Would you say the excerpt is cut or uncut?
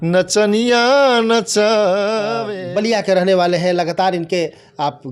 cut